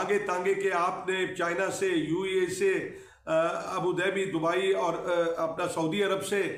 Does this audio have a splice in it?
no; 0 cuts

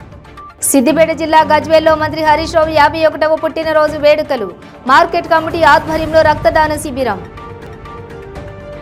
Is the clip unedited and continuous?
yes; 0 cuts

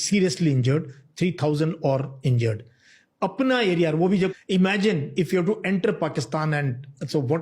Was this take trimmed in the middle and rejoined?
yes; 1 cut; at 4.3 s

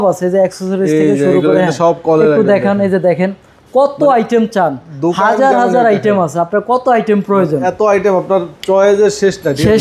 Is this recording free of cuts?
yes; 0 cuts

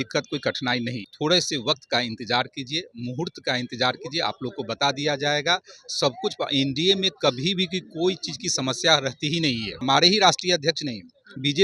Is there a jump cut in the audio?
yes; 2 cuts; at 1.0 s, 9.8 s

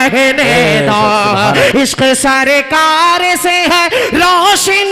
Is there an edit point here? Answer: yes; 1 cut; at 1.7 s

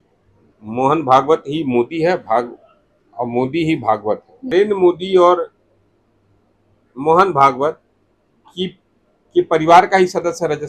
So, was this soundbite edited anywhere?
yes; 1 cut; at 4.5 s

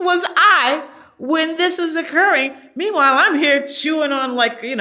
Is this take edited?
no; 0 cuts

